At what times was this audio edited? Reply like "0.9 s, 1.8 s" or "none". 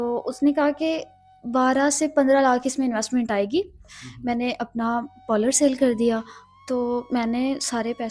3.8 s